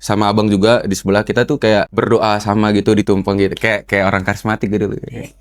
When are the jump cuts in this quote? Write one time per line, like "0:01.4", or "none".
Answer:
0:01.9